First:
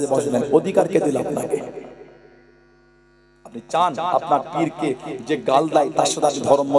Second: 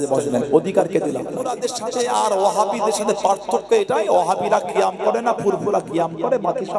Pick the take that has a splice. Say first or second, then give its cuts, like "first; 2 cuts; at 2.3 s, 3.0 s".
second; 1 cut; at 1.6 s